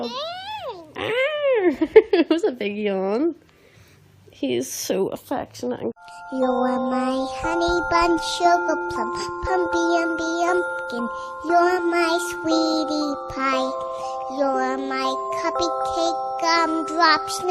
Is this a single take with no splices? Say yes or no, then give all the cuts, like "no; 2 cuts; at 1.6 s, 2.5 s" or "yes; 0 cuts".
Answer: no; 1 cut; at 5.9 s